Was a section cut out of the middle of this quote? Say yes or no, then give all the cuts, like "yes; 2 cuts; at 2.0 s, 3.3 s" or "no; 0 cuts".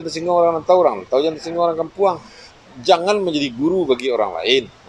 no; 0 cuts